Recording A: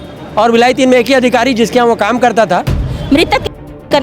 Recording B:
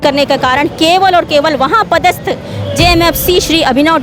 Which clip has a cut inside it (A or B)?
A